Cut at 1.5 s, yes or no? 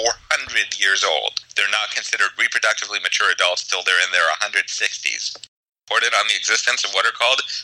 yes